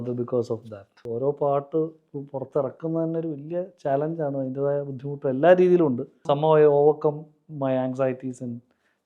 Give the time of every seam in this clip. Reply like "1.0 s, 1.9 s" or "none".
1.0 s, 6.1 s